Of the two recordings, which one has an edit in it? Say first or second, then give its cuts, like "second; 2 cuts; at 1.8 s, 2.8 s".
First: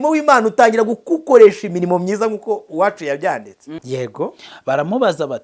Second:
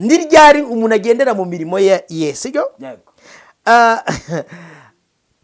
first; 1 cut; at 3.7 s